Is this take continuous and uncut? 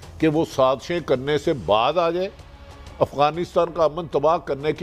yes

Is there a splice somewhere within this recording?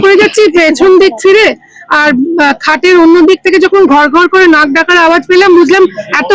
no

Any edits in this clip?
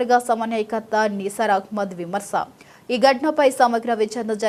no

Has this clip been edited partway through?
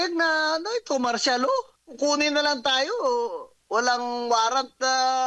yes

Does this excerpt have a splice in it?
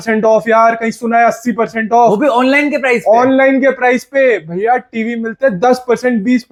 no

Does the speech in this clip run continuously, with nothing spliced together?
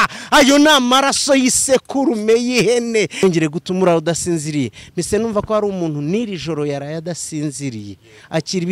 no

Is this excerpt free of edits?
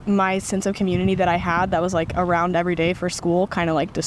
yes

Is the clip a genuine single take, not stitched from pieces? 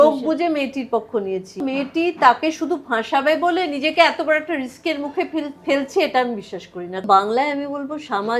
no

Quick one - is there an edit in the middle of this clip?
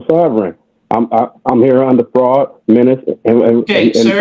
no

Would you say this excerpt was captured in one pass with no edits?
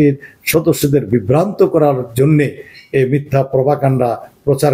yes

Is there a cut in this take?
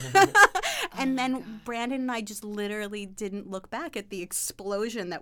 no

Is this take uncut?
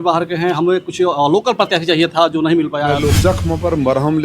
no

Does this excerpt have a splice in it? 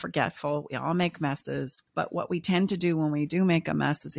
yes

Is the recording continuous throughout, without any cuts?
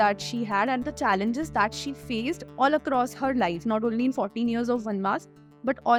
yes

